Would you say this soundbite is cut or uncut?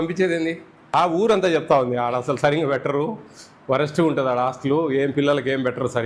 cut